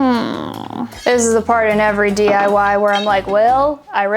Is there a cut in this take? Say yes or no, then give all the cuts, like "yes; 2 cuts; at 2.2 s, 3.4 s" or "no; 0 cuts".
yes; 1 cut; at 0.9 s